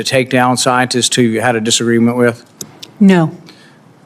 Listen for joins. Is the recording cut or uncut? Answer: cut